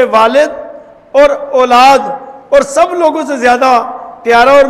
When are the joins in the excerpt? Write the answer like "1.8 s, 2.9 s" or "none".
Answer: none

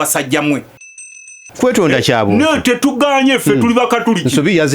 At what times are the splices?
1.0 s

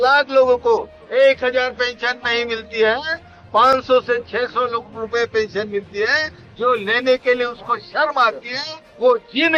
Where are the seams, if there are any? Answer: none

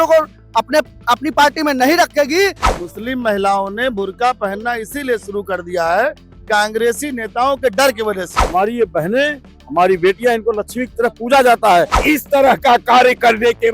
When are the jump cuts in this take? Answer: 2.7 s, 8.3 s, 12.0 s

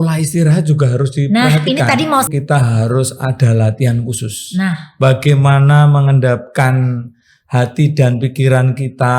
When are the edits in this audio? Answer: 2.3 s

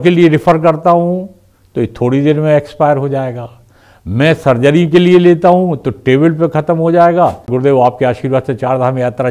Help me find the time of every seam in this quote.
7.5 s

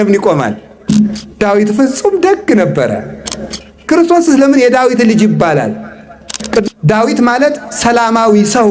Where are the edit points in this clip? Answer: 6.6 s

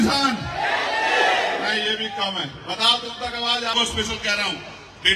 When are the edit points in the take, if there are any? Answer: 3.7 s

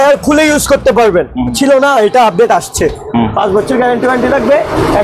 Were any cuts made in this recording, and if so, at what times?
1.6 s

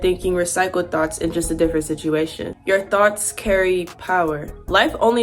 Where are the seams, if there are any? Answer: 2.4 s, 4.4 s

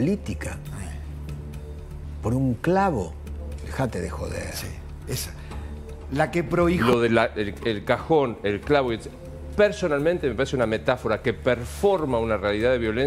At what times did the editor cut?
6.8 s

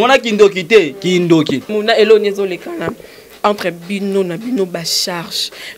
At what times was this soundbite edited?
1.7 s

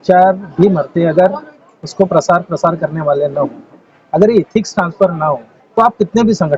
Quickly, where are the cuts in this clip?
5.5 s

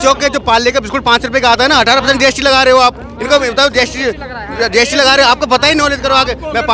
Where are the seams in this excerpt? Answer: none

